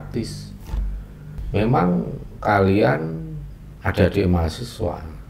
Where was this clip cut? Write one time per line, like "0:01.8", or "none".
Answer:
none